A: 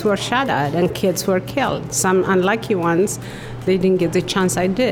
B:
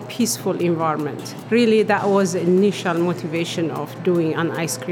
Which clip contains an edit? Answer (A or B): B